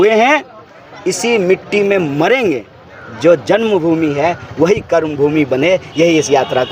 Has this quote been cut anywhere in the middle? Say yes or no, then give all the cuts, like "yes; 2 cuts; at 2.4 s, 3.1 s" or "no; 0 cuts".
no; 0 cuts